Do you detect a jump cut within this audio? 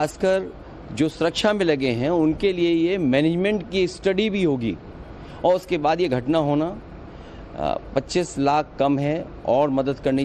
no; 0 cuts

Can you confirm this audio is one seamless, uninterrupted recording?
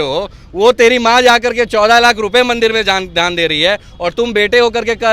yes; 0 cuts

